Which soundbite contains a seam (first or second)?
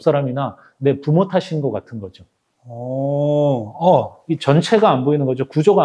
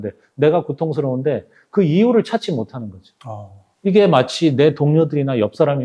first